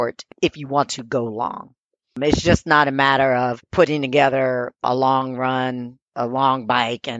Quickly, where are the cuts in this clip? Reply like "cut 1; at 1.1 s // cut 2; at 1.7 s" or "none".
cut 1; at 3.6 s // cut 2; at 4.8 s // cut 3; at 6.1 s

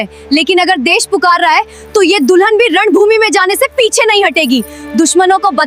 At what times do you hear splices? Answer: none

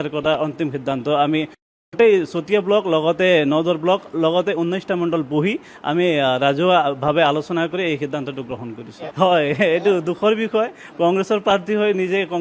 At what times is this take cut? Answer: cut 1; at 9.0 s

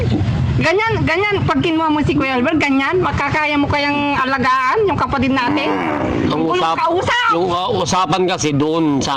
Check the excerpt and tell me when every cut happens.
none

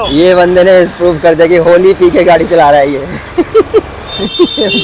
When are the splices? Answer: none

